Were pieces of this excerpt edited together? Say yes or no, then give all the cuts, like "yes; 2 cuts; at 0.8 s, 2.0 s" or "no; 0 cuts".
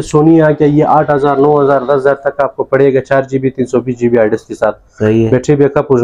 no; 0 cuts